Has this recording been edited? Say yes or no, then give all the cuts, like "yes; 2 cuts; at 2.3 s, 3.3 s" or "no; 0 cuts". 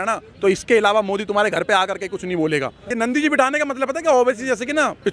yes; 1 cut; at 2.9 s